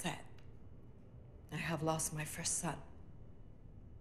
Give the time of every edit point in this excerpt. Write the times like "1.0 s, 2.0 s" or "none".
none